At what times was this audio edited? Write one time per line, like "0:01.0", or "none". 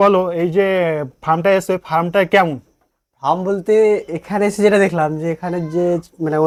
none